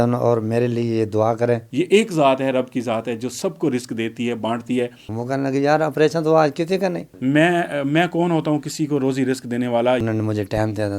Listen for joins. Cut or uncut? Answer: cut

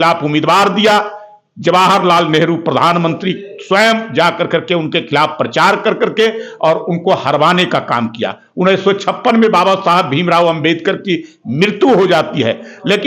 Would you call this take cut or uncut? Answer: uncut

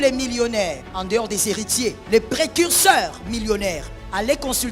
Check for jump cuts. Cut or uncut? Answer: cut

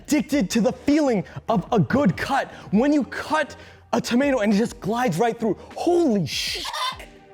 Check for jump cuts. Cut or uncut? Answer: uncut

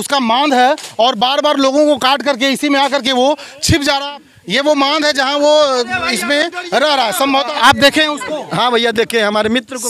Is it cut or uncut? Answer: cut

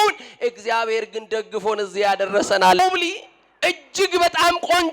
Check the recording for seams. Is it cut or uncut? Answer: cut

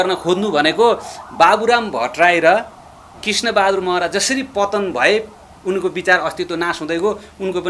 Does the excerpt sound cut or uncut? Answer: uncut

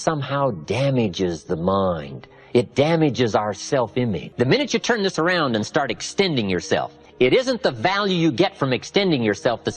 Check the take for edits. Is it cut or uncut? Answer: cut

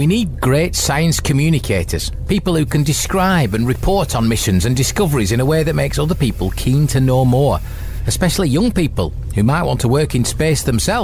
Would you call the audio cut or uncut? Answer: uncut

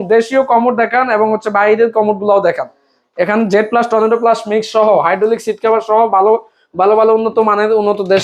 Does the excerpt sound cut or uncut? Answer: uncut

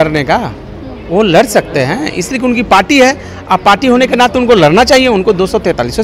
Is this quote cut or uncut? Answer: uncut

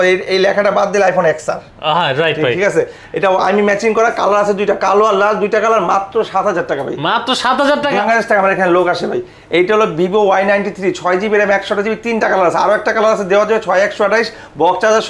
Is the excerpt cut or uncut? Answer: cut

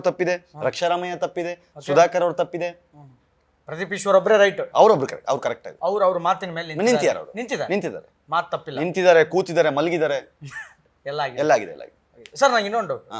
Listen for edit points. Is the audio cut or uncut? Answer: uncut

